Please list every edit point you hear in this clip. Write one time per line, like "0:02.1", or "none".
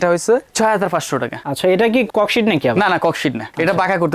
none